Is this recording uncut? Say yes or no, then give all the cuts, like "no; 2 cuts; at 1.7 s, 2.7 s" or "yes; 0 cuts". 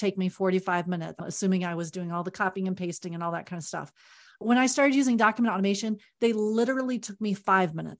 no; 2 cuts; at 1.3 s, 4.4 s